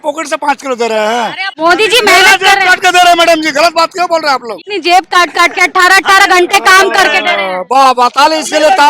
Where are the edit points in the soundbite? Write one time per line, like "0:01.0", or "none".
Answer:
0:01.4
0:04.6

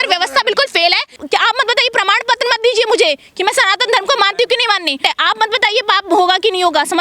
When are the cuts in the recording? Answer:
0:01.1
0:05.0

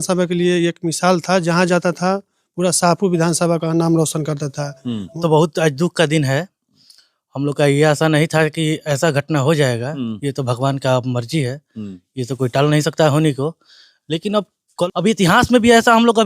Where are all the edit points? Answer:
0:05.1
0:14.7

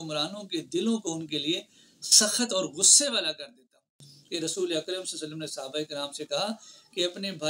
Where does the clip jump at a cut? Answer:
0:04.1

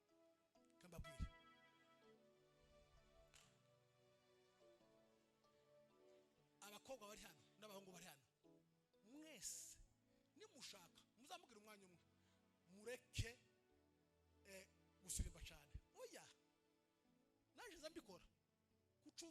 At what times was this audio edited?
none

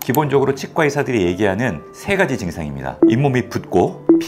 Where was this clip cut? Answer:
0:02.9

